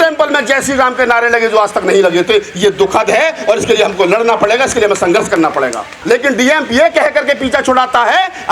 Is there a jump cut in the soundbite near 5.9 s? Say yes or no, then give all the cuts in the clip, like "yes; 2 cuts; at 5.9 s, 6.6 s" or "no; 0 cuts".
yes; 1 cut; at 5.9 s